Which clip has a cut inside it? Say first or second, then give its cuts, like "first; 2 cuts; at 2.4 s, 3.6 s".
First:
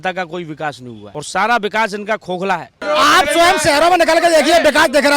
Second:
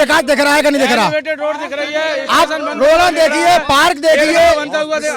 first; 2 cuts; at 0.9 s, 2.8 s